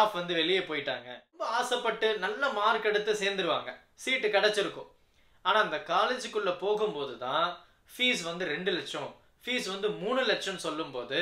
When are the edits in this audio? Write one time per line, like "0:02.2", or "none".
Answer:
0:01.5